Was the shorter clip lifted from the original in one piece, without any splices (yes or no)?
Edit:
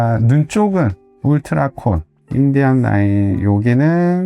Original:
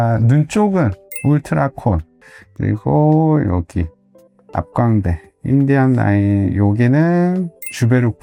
no